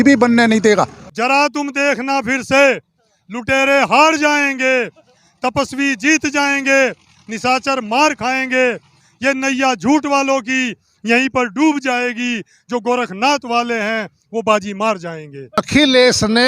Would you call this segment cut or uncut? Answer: cut